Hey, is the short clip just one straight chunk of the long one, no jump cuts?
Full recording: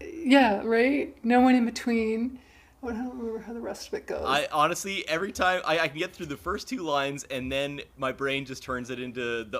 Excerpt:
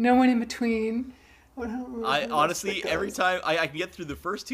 no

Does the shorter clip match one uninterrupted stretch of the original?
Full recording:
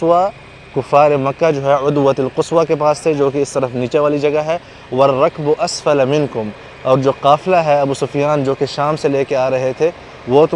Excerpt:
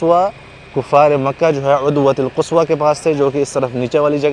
yes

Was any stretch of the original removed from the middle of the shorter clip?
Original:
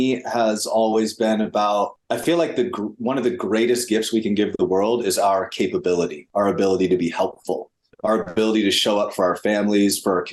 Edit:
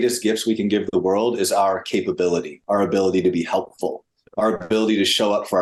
no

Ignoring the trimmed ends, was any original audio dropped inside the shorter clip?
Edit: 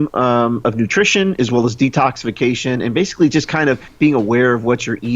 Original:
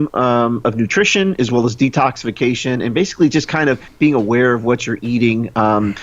no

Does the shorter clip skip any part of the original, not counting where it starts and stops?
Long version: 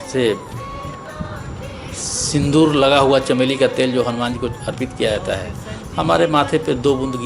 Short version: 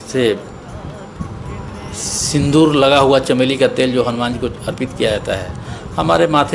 no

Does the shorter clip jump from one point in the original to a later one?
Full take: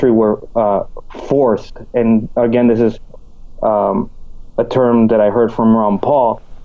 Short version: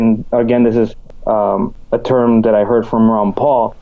yes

